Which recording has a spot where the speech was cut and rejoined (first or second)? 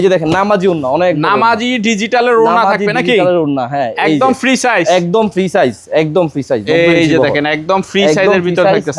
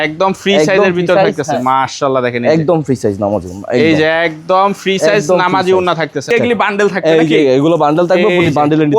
second